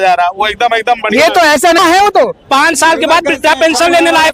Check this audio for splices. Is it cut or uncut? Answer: cut